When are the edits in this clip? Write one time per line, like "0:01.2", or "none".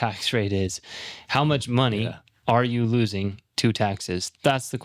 none